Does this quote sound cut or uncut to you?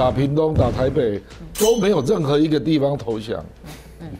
uncut